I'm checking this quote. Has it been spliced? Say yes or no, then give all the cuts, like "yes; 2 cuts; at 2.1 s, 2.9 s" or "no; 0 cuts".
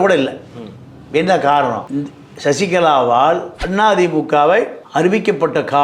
yes; 1 cut; at 3.6 s